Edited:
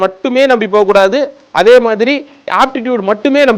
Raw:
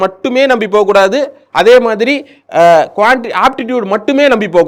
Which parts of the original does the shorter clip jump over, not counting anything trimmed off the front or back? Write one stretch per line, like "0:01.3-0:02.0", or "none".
0:02.4-0:03.3